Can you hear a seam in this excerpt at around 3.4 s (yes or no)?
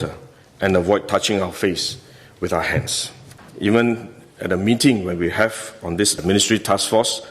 yes